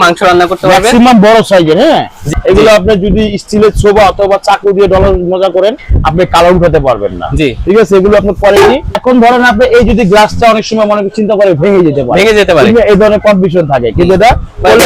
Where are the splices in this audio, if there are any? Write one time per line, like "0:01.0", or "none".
0:02.2
0:09.0